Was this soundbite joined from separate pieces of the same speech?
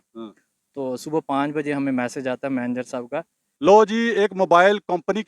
yes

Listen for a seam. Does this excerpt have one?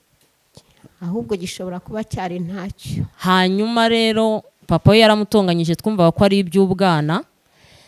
yes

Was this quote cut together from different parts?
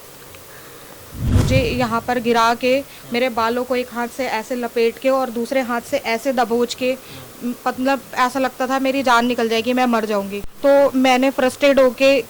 yes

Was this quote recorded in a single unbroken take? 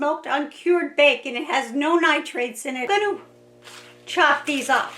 no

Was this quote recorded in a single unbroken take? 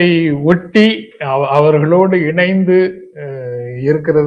yes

